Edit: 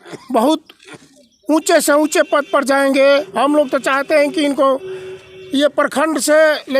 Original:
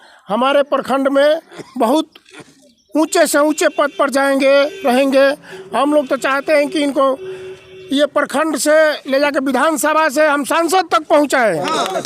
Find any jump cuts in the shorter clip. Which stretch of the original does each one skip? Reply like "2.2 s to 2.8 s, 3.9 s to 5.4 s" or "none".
4.7 s to 5.7 s